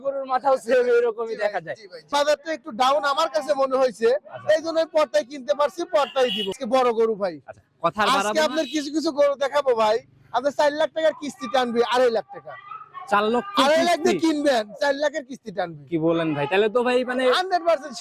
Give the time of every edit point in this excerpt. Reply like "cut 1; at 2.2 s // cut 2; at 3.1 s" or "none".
cut 1; at 2.1 s // cut 2; at 6.5 s

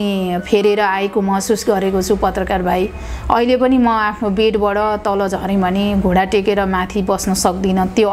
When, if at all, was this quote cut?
none

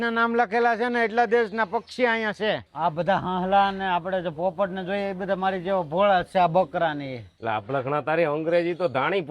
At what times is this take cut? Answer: cut 1; at 2.7 s // cut 2; at 7.4 s

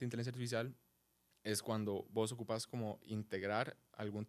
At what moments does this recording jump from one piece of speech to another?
none

